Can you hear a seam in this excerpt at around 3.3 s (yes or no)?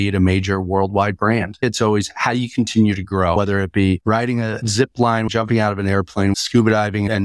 yes